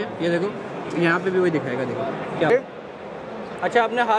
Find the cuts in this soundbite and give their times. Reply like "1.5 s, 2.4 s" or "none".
2.5 s